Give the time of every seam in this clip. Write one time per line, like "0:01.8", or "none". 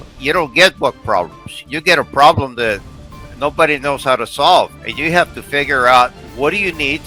none